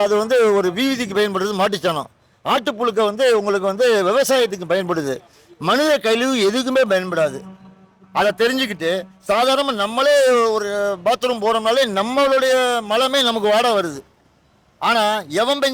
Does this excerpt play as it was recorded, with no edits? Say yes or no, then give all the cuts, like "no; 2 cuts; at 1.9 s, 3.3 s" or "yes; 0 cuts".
yes; 0 cuts